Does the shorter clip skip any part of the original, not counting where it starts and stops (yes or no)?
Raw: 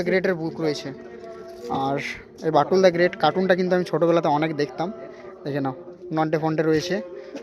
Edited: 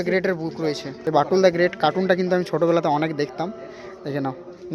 yes